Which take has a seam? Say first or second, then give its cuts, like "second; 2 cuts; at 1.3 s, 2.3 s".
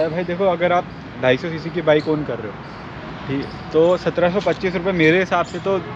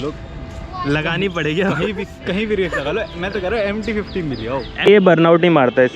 second; 1 cut; at 4.9 s